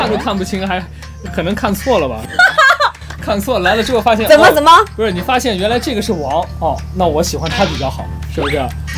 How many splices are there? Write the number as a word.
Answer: zero